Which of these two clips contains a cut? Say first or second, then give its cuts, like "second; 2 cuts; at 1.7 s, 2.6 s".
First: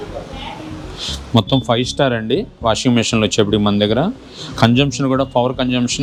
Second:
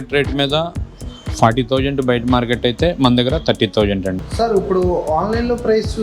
second; 1 cut; at 4.2 s